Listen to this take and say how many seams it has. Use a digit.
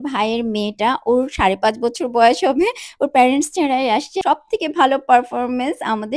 1